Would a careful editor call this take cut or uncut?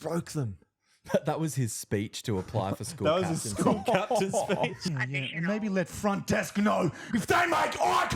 cut